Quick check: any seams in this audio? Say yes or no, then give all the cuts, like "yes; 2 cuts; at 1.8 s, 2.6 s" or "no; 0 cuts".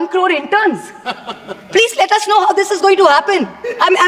no; 0 cuts